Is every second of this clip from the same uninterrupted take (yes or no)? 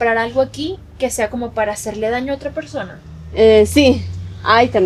yes